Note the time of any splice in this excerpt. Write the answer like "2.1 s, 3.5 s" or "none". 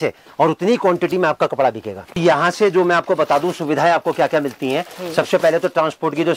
2.2 s